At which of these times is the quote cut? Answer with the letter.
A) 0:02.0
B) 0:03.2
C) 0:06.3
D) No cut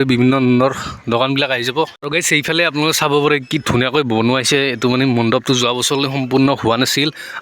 A